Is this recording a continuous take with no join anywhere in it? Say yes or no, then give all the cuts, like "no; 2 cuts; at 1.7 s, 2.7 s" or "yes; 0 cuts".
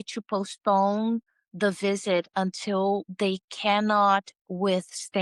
yes; 0 cuts